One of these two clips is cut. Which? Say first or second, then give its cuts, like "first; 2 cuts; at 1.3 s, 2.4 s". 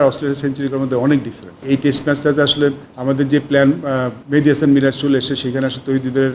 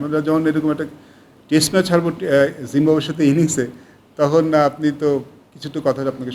first; 3 cuts; at 1.6 s, 2.9 s, 4.2 s